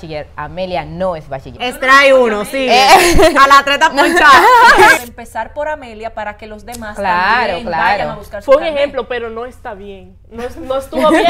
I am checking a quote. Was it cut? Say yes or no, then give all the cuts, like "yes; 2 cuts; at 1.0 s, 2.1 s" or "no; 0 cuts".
yes; 2 cuts; at 1.5 s, 5.0 s